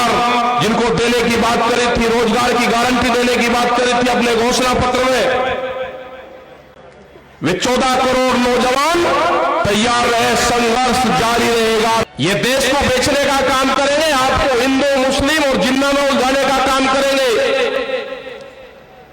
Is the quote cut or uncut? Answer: cut